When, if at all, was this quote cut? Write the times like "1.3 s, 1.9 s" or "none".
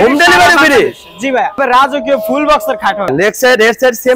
1.6 s, 3.1 s